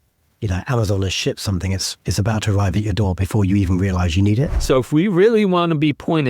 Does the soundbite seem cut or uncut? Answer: cut